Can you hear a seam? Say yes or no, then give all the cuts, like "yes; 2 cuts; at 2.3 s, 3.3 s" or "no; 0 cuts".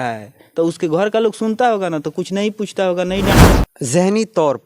yes; 1 cut; at 3.5 s